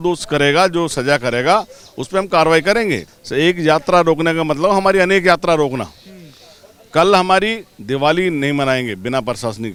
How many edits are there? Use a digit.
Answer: 0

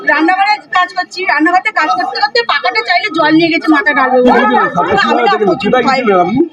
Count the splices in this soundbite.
1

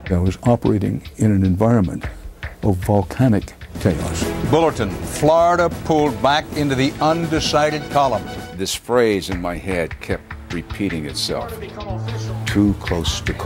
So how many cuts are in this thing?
0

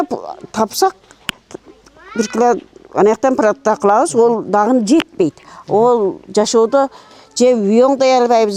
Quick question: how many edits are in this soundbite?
0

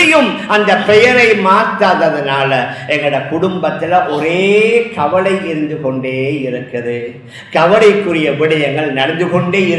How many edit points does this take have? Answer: 0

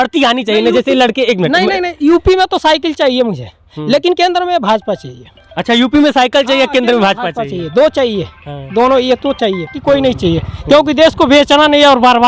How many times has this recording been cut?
1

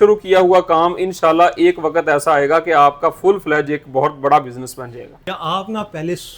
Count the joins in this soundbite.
1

